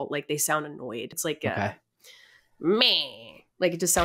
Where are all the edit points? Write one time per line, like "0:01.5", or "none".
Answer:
0:01.1